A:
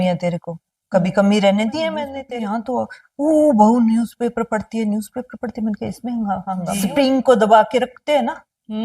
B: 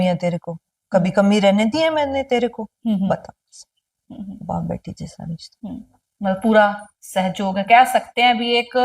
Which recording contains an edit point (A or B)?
A